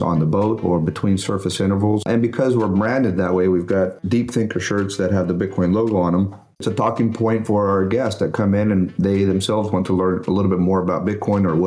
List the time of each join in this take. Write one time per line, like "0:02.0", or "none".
0:02.0
0:04.0
0:06.6